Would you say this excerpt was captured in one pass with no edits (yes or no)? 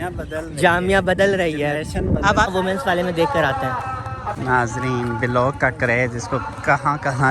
no